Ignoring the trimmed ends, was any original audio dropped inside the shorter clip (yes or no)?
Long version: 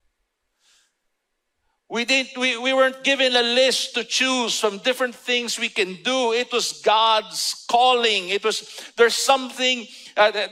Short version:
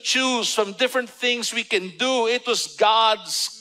no